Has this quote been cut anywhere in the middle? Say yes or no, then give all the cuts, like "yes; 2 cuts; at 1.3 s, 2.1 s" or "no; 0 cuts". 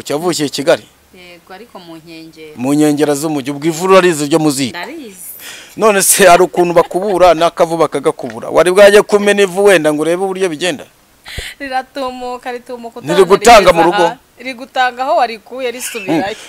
no; 0 cuts